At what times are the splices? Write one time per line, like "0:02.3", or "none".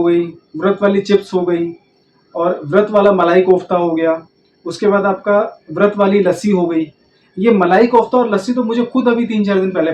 none